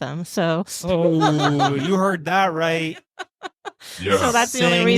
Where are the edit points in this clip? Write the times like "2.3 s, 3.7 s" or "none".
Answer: none